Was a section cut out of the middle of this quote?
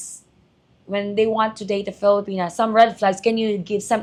no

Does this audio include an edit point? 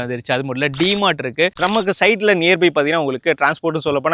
yes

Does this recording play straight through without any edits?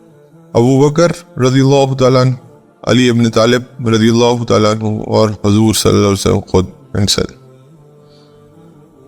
no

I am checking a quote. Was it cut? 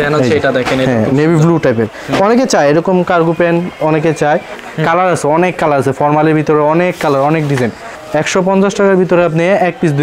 yes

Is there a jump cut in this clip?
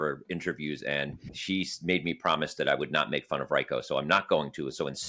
yes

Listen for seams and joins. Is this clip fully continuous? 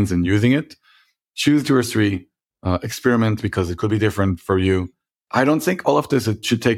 yes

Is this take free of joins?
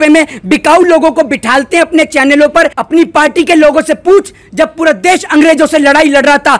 no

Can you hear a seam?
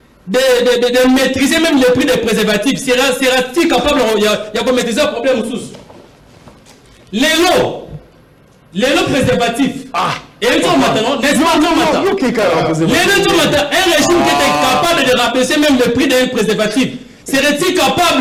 no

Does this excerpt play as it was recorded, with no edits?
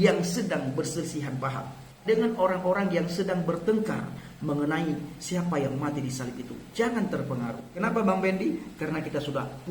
no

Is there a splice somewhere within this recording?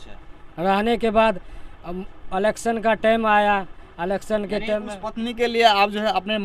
no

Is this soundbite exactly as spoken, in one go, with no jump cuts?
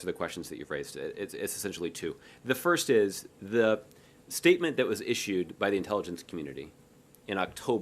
no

